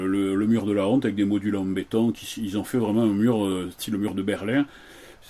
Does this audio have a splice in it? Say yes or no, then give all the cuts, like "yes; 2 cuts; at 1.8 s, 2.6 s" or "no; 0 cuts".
no; 0 cuts